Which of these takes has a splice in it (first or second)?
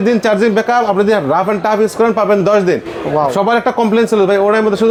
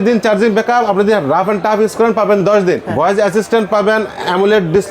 second